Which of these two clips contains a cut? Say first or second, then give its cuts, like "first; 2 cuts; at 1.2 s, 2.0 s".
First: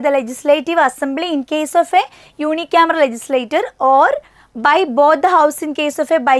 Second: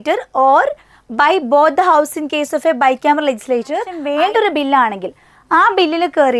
second; 1 cut; at 4.0 s